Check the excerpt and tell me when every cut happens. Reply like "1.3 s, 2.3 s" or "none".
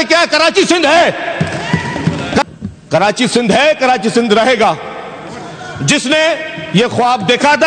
2.4 s